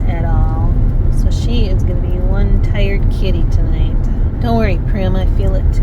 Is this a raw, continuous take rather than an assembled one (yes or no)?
no